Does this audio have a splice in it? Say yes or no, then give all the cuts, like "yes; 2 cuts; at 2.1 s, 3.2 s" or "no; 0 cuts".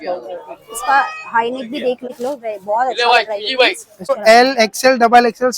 yes; 2 cuts; at 2.1 s, 4.1 s